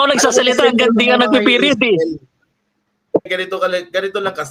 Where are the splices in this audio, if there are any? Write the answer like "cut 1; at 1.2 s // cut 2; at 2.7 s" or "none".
cut 1; at 3.3 s

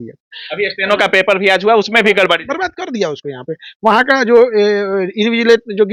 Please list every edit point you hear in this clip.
none

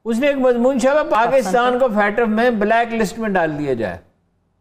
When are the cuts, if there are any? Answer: cut 1; at 1.2 s

